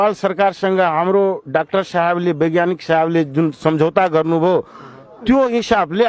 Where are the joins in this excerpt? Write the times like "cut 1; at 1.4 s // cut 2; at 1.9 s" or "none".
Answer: none